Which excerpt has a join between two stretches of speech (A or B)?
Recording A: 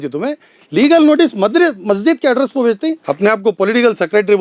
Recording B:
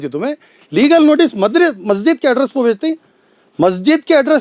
A